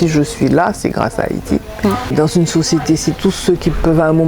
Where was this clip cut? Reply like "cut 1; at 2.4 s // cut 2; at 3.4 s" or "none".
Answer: cut 1; at 2.1 s